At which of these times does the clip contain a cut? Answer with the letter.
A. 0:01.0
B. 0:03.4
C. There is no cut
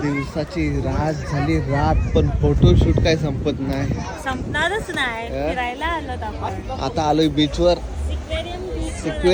C